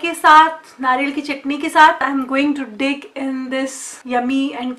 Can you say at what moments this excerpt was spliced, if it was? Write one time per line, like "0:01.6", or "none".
0:02.0
0:03.9